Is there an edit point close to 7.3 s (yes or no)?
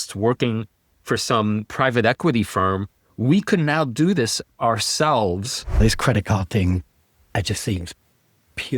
no